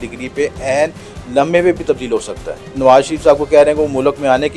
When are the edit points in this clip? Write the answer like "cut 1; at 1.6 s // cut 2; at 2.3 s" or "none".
cut 1; at 2.7 s